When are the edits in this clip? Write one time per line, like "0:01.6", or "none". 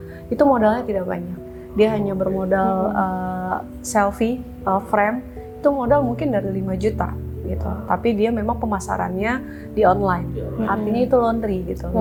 none